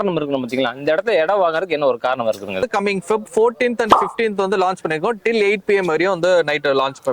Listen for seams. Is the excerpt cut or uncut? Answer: cut